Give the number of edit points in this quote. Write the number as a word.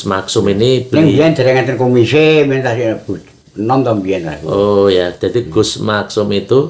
zero